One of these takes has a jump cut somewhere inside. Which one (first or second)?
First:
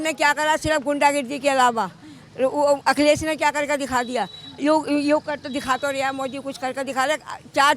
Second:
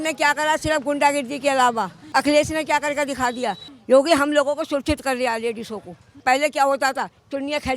second